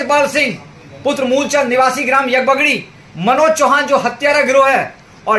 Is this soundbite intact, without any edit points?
yes; 0 cuts

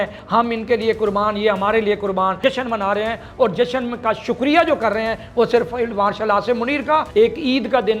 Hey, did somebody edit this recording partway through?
yes; 2 cuts; at 2.4 s, 7.1 s

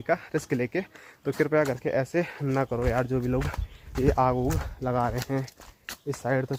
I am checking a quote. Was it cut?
no; 0 cuts

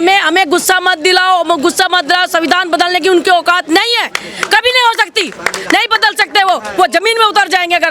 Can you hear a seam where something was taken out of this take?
no; 0 cuts

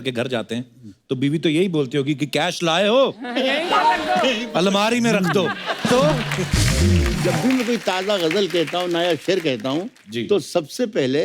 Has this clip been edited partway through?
yes; 1 cut; at 7.2 s

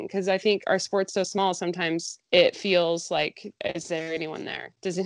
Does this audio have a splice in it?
yes; 2 cuts; at 2.1 s, 3.5 s

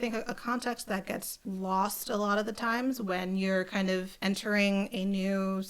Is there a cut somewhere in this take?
yes; 2 cuts; at 1.3 s, 4.1 s

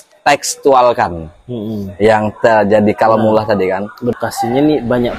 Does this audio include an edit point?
yes; 1 cut; at 4.1 s

